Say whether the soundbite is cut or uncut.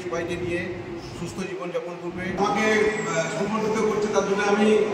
cut